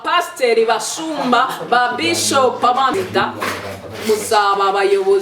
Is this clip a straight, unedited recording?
no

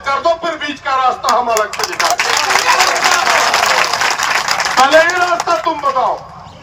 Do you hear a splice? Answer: no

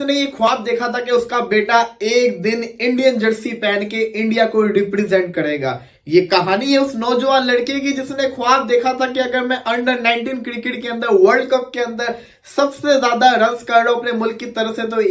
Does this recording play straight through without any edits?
yes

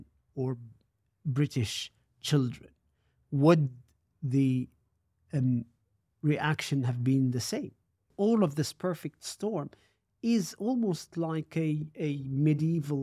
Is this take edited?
yes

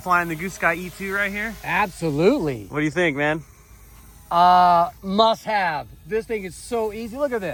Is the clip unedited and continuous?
yes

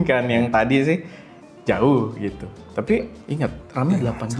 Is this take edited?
yes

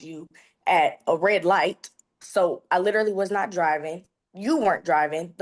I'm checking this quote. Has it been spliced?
no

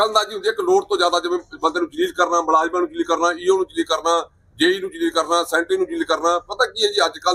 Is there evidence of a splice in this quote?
no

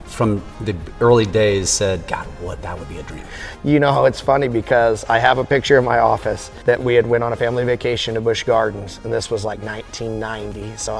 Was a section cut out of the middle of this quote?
no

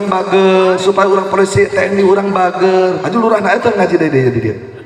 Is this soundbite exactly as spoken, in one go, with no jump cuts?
yes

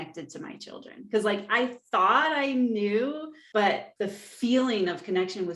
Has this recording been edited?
yes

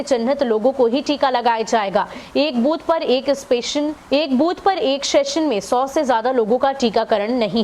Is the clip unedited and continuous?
no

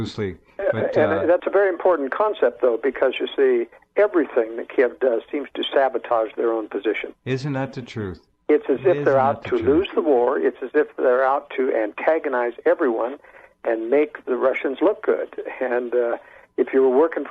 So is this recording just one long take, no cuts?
no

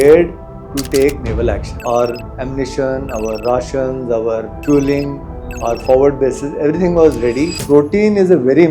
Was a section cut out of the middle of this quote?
yes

